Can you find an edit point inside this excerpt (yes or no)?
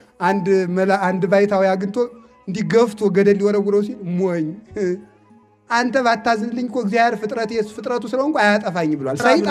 no